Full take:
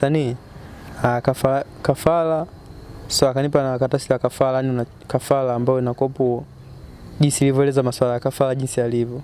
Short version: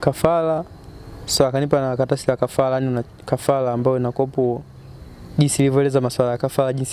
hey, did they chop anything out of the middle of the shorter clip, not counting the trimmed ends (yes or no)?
no